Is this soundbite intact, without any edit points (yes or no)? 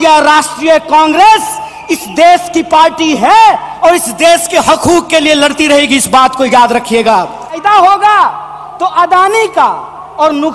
no